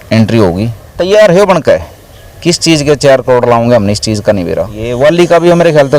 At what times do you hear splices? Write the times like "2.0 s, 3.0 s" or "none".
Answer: 0.9 s, 4.8 s